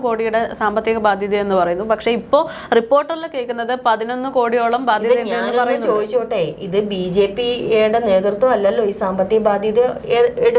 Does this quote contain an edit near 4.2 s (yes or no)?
no